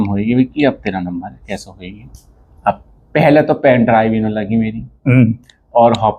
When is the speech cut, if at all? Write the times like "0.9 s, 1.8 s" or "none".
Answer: none

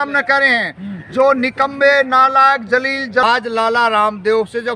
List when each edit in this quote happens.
3.2 s

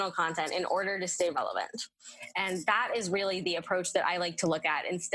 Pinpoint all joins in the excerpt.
1.3 s

